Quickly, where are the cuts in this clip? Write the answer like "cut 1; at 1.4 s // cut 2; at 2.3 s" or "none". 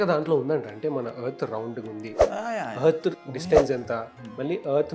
cut 1; at 3.2 s